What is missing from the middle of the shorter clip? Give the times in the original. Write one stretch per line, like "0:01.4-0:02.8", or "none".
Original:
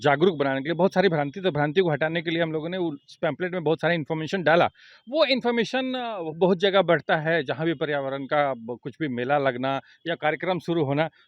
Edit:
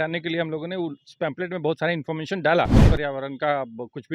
0:04.9-0:07.8